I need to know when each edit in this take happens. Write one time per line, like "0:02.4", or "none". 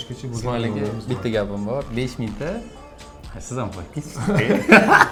none